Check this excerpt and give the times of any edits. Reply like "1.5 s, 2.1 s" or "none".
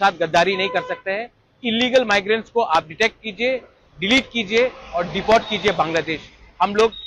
none